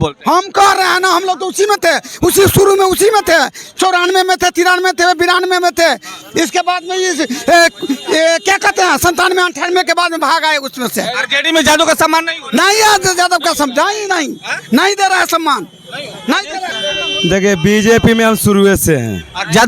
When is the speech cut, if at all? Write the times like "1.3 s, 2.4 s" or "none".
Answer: 16.7 s